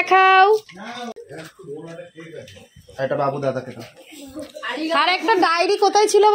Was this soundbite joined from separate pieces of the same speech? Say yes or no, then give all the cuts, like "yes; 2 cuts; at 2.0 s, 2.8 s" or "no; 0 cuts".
yes; 1 cut; at 1.1 s